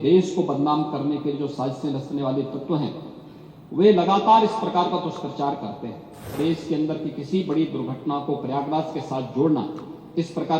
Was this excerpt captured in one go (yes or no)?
no